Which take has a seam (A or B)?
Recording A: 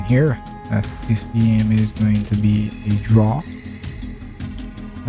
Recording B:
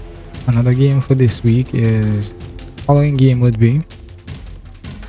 B